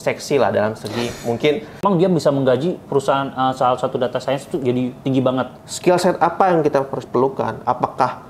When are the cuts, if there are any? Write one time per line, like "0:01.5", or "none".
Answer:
0:01.8
0:05.6